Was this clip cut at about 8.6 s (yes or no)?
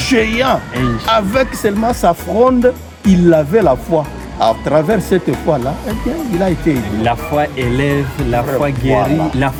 no